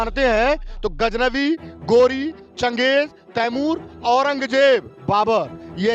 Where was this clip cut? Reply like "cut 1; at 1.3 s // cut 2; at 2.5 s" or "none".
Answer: none